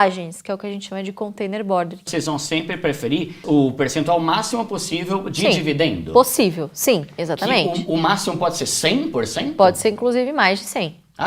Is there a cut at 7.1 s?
no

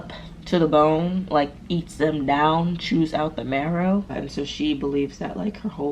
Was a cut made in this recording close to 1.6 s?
no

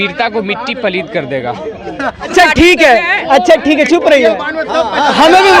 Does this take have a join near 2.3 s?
yes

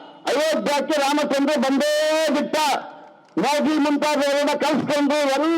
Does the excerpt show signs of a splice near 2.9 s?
no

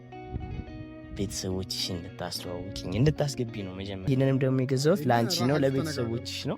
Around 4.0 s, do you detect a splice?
yes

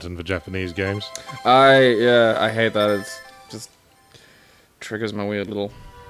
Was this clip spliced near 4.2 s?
no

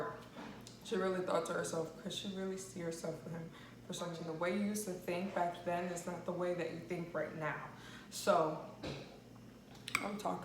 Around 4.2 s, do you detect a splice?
yes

